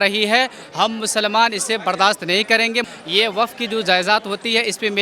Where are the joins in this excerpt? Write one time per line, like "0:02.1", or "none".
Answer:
0:02.9